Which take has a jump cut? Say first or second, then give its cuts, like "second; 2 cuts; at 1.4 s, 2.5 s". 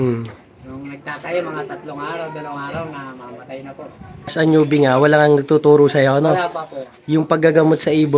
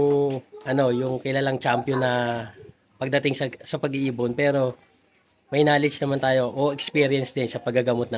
first; 1 cut; at 4.3 s